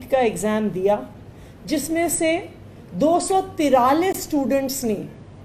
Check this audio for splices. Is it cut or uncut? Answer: uncut